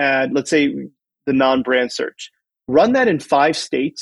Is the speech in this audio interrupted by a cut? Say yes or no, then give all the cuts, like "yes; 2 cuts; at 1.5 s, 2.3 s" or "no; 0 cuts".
no; 0 cuts